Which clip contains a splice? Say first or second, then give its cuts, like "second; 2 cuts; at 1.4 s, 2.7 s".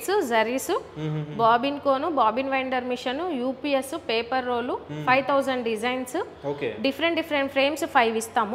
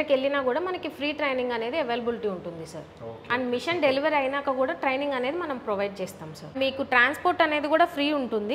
second; 1 cut; at 6.5 s